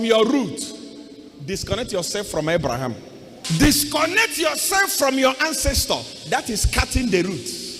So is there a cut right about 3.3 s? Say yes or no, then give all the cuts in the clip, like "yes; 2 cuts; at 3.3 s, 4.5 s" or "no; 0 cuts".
yes; 1 cut; at 3.3 s